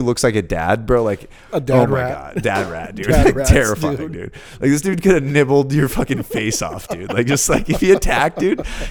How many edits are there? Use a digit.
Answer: 0